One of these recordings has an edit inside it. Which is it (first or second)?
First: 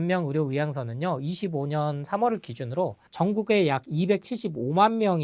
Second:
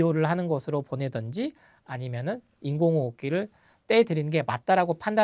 first